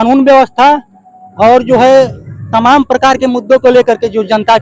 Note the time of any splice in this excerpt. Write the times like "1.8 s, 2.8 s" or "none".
none